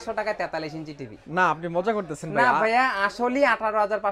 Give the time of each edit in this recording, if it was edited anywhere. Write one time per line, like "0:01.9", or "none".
none